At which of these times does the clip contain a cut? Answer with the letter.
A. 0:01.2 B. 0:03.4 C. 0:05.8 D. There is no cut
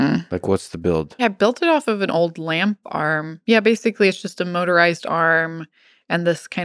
A